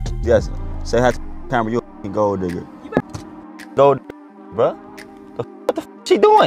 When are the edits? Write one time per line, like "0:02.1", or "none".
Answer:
0:03.1